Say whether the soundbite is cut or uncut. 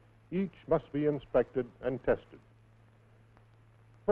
cut